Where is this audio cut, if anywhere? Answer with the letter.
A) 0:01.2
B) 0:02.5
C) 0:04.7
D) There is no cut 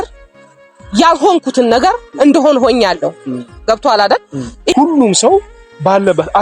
C